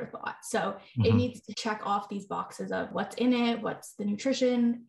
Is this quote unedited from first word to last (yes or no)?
no